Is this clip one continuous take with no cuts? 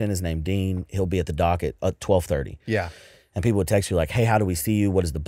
yes; 0 cuts

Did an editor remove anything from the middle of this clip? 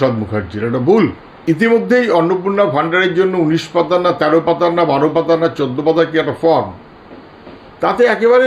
yes; 1 cut; at 1.4 s

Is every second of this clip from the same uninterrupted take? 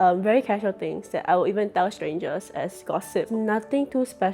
no; 1 cut; at 3.3 s

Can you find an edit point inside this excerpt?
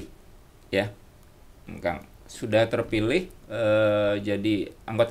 no; 0 cuts

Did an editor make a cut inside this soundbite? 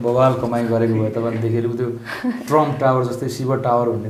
no; 0 cuts

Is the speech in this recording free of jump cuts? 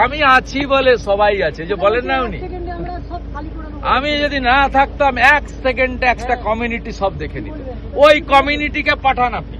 yes; 0 cuts

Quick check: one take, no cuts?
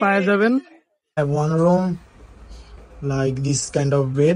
no; 1 cut; at 1.1 s

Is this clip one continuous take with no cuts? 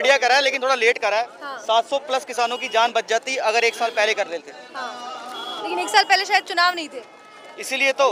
yes; 0 cuts

